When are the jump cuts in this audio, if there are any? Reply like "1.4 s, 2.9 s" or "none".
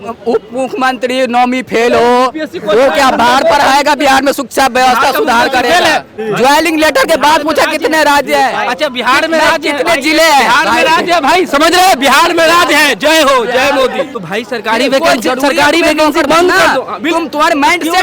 6.1 s, 14.2 s